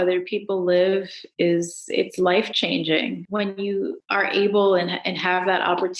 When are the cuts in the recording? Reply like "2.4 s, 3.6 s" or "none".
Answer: 3.2 s, 4.0 s